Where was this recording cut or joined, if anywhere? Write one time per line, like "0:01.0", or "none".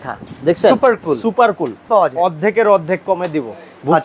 0:01.8